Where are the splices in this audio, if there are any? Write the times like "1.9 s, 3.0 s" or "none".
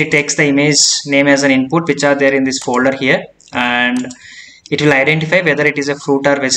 none